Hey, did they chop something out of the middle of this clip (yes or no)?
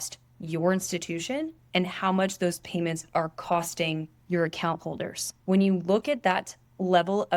yes